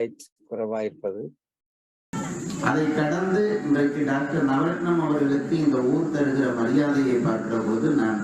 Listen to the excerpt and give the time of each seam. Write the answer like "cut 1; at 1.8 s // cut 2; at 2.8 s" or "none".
cut 1; at 2.1 s